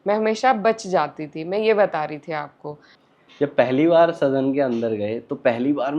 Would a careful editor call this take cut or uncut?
cut